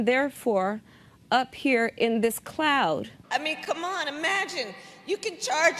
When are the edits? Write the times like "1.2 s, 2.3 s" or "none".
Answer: 3.1 s